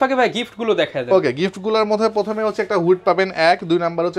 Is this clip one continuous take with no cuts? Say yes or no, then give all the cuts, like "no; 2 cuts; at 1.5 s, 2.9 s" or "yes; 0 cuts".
yes; 0 cuts